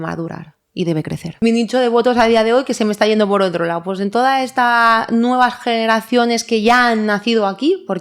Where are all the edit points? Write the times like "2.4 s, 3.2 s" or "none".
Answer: 1.2 s